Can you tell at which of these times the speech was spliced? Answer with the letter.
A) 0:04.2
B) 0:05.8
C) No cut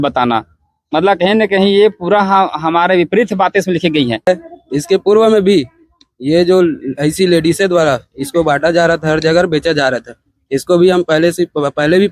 A